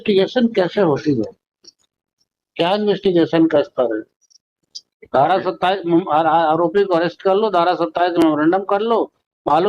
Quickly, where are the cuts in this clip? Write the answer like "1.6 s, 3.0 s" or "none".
none